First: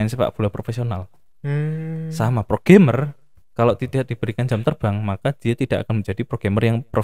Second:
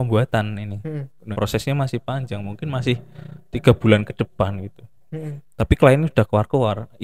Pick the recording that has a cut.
second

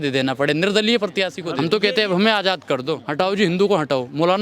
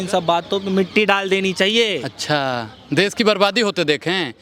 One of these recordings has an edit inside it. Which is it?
first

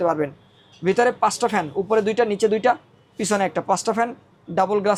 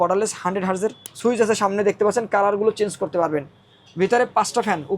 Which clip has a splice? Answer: second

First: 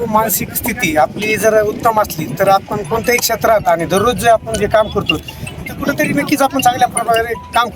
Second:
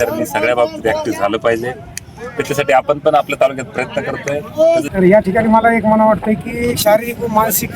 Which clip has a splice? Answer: second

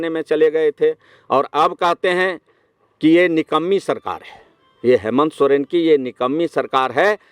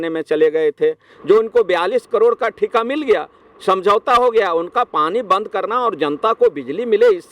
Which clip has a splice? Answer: second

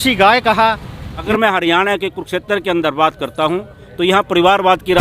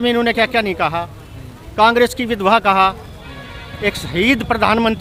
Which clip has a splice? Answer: first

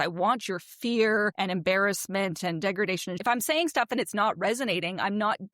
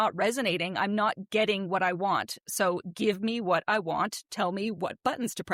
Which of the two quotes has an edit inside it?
first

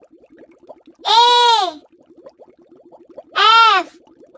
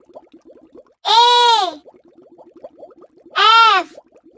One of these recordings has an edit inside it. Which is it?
second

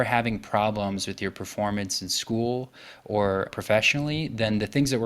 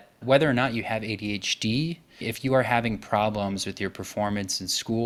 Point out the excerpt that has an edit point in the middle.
first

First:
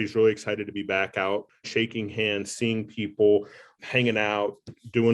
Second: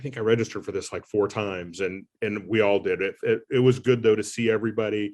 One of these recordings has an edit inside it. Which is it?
first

